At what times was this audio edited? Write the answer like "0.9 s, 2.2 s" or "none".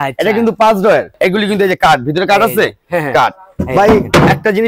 1.1 s